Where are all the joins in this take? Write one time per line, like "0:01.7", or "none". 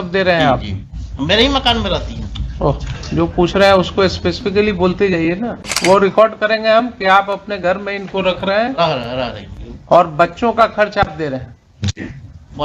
0:05.6